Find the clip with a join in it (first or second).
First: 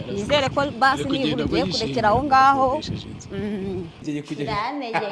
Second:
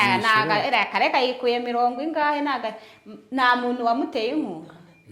first